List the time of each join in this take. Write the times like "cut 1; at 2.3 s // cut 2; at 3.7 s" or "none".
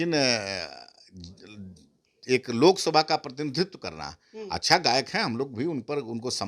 none